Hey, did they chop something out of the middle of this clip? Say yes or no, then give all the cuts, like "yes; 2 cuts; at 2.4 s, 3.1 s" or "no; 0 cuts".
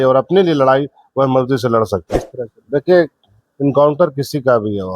yes; 1 cut; at 2.2 s